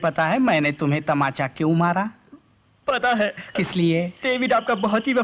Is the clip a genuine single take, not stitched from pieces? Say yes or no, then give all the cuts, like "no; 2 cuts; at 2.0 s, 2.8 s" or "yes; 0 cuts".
yes; 0 cuts